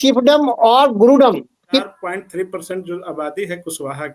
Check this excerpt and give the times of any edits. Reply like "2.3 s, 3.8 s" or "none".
1.8 s